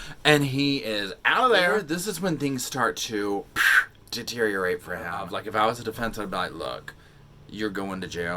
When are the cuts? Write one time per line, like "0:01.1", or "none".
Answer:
0:01.9
0:05.3